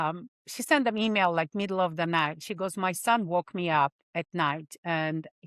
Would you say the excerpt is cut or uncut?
uncut